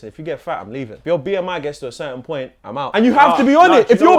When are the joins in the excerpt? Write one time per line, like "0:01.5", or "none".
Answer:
0:00.9
0:02.8